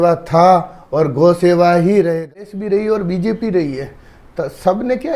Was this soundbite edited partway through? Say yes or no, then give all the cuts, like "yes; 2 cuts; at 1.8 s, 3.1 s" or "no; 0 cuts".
yes; 1 cut; at 2.0 s